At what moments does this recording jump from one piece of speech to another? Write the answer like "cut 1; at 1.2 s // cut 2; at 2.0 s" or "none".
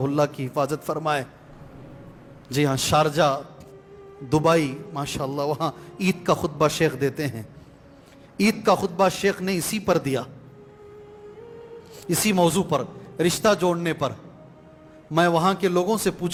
none